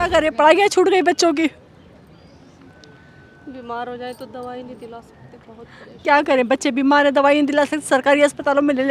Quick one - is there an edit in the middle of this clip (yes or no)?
no